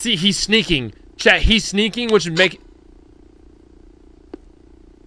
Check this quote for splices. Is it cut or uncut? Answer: uncut